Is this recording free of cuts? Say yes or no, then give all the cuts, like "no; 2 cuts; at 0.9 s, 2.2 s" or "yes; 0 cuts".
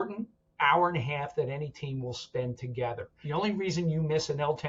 no; 1 cut; at 3.1 s